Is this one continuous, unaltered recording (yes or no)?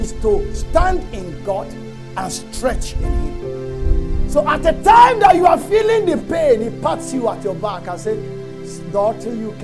yes